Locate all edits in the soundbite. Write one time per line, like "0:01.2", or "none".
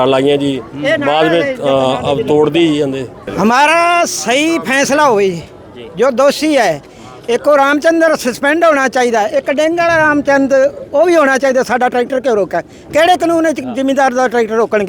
0:03.3